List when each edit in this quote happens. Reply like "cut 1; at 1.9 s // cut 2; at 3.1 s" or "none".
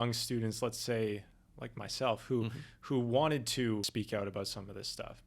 cut 1; at 3.9 s